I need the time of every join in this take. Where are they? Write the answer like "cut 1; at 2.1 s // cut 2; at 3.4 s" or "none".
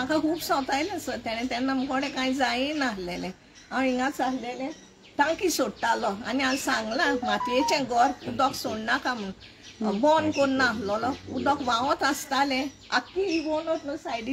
none